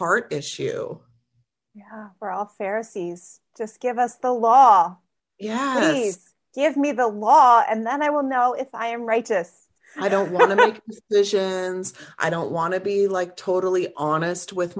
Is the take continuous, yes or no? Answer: yes